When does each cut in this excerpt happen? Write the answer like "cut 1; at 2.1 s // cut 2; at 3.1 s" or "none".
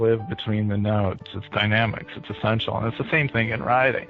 cut 1; at 1.2 s